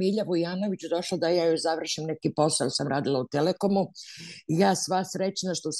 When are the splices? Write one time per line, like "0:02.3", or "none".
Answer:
none